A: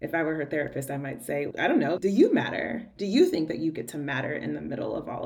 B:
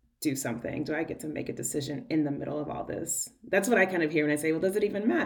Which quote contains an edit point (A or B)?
A